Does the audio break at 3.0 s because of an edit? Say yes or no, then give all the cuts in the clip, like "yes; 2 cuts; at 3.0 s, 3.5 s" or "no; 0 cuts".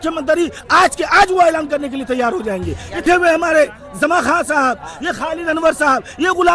yes; 1 cut; at 3.0 s